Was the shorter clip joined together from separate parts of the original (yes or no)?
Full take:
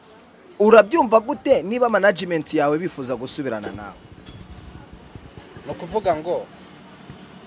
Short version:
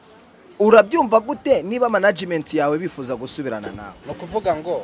yes